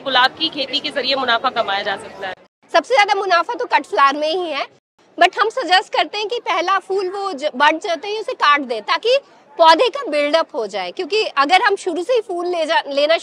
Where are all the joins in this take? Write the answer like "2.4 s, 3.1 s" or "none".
2.5 s, 4.8 s

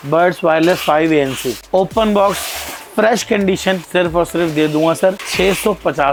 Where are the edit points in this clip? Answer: none

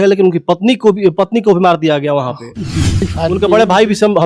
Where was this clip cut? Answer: 3.1 s

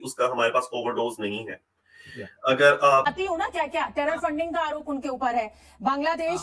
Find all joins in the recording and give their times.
3.0 s

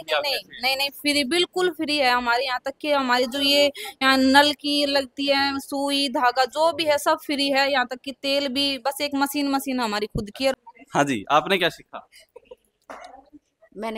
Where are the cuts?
10.6 s

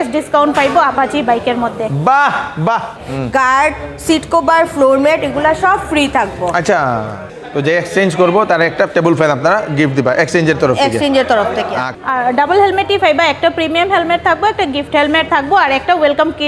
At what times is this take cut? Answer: 3.0 s, 7.3 s, 11.9 s

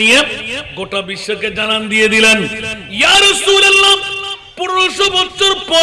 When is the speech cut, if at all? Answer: none

